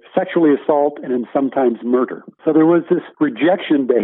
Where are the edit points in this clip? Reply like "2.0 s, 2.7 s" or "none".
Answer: 2.2 s, 3.1 s

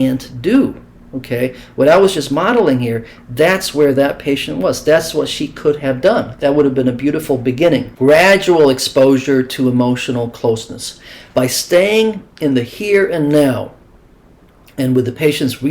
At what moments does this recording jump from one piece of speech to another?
7.9 s

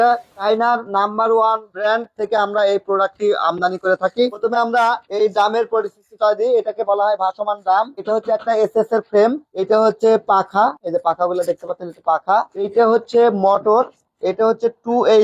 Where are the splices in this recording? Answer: 4.4 s

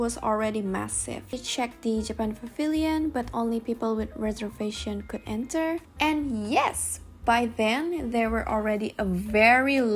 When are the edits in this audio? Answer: 1.4 s, 5.9 s

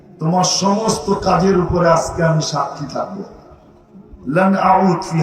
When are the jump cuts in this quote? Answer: none

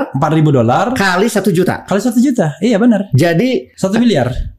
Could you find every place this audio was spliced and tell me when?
3.7 s

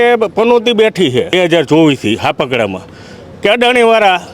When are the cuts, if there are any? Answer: 1.3 s

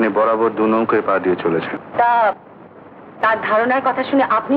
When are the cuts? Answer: 1.8 s

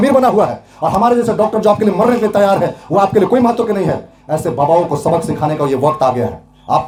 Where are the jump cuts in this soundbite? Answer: none

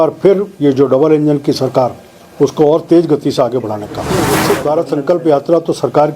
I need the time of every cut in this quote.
4.0 s

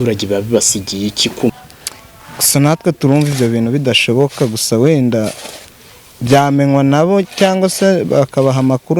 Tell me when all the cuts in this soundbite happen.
1.5 s

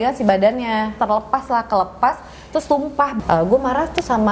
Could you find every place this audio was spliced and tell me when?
1.0 s, 3.2 s

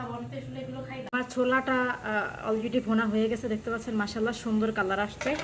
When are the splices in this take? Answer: 1.1 s

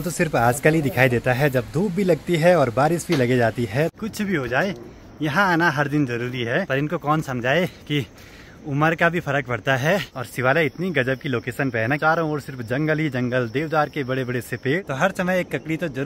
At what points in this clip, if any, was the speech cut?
3.9 s, 6.7 s, 10.2 s, 12.0 s, 14.8 s

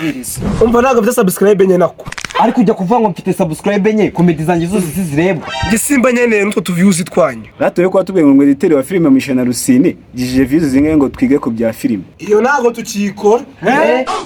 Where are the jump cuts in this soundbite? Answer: none

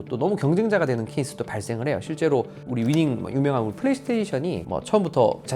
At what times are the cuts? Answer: 2.7 s

